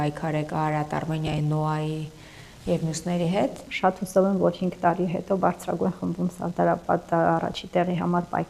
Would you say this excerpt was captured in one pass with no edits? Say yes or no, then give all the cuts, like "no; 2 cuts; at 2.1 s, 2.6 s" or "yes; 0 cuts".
no; 1 cut; at 3.7 s